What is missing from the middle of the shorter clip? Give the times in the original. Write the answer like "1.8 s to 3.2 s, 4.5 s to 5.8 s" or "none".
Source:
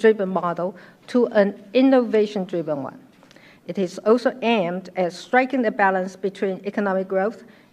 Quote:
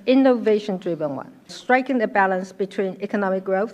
3.2 s to 5.2 s

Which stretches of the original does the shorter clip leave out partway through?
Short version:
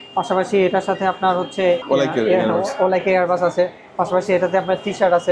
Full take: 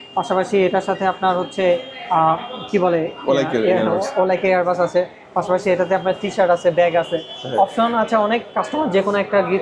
1.8 s to 3.2 s

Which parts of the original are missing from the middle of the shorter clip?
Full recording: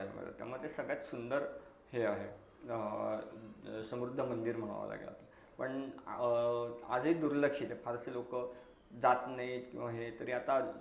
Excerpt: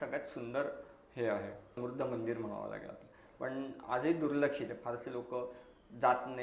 2.5 s to 3.9 s, 6.0 s to 6.8 s

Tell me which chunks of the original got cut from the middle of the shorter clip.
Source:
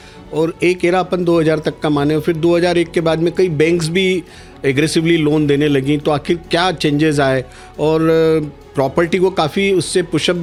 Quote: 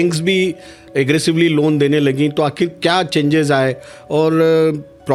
none

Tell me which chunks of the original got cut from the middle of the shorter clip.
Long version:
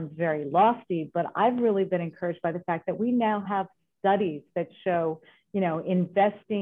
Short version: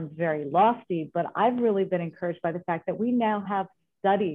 none

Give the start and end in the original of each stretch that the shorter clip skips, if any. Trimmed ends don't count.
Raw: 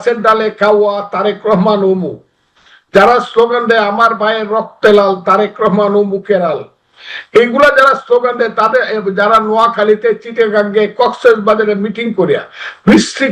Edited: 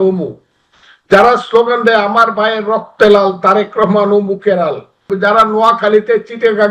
6.9 s to 9.0 s

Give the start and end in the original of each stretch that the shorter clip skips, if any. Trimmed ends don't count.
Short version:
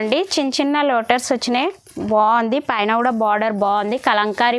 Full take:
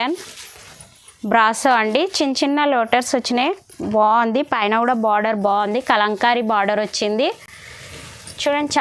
none

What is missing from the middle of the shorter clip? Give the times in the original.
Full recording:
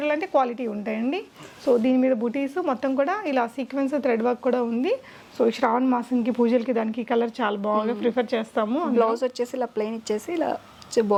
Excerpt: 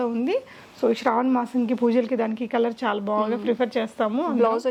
none

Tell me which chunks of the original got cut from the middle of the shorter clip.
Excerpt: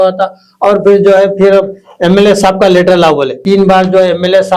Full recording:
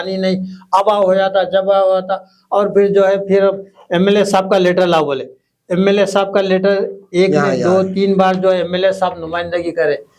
5.3 s to 7.9 s

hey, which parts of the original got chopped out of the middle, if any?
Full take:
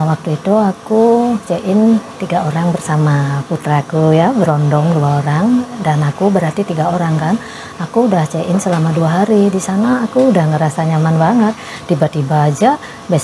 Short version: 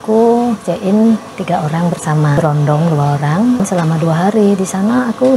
3.2 s to 4.4 s, 5.6 s to 8.5 s

